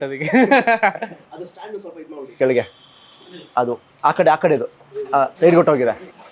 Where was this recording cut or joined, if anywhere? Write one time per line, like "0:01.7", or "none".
0:03.9
0:05.3